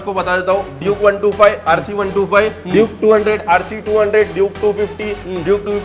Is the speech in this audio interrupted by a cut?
no; 0 cuts

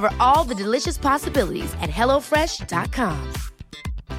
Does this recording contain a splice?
no; 0 cuts

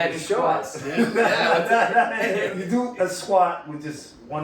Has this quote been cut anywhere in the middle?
yes; 1 cut; at 2.5 s

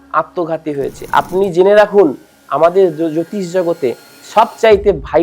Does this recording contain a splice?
yes; 1 cut; at 1.0 s

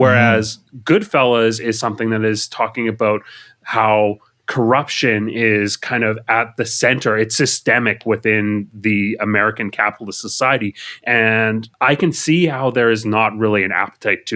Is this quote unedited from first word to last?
no; 1 cut; at 11.7 s

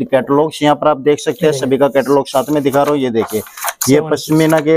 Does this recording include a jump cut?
no; 0 cuts

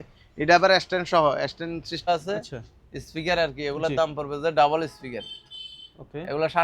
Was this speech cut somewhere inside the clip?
yes; 1 cut; at 2.1 s

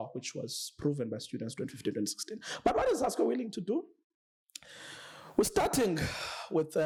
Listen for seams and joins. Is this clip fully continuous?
yes; 0 cuts

